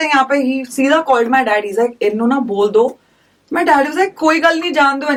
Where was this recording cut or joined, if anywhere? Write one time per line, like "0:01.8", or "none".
none

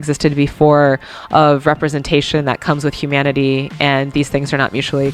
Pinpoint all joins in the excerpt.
none

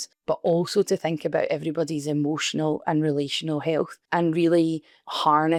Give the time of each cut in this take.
none

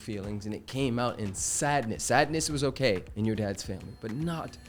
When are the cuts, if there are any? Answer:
none

